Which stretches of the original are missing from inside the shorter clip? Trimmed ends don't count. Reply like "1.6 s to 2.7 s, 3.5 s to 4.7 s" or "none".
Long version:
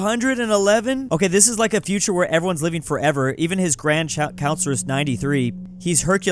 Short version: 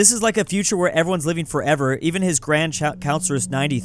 none